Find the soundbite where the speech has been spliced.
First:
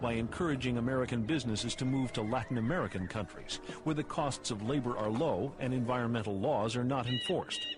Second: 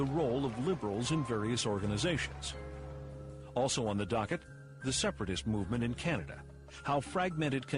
first; 1 cut; at 6.3 s

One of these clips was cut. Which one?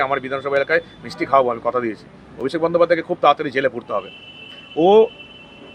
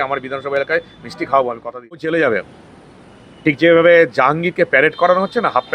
second; 1 cut; at 2.0 s

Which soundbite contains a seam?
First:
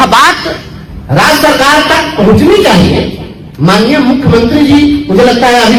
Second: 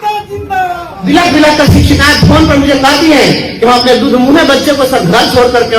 second; 1 cut; at 1.0 s

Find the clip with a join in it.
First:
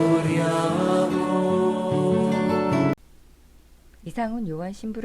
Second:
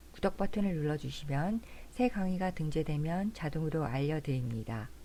first; 1 cut; at 2.9 s

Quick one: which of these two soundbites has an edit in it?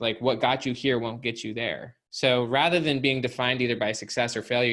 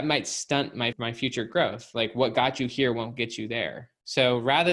second; 1 cut; at 0.9 s

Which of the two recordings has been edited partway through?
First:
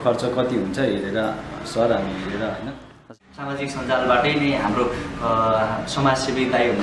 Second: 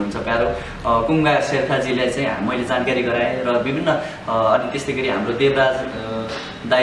first; 1 cut; at 3.1 s

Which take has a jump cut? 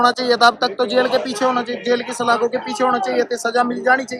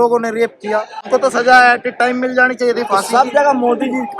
second; 1 cut; at 1.0 s

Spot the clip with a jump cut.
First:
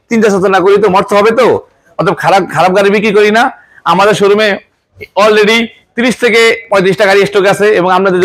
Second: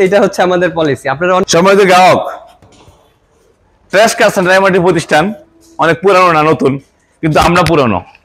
second; 1 cut; at 1.4 s

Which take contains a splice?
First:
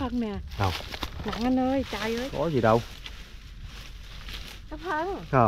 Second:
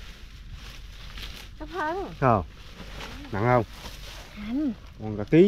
first; 1 cut; at 2.1 s

